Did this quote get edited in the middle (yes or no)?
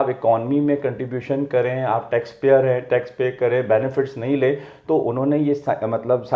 no